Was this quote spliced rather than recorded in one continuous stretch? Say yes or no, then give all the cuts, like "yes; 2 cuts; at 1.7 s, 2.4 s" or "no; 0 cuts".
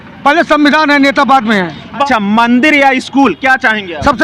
yes; 1 cut; at 2.0 s